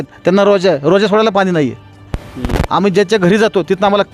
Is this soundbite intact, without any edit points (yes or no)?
yes